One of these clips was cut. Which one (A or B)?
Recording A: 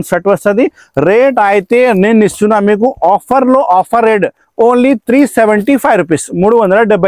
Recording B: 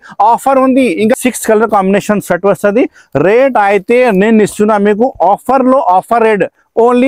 B